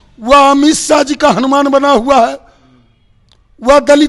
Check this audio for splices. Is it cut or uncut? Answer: uncut